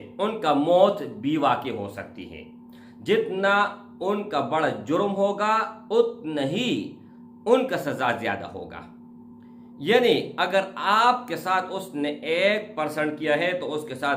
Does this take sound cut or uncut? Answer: uncut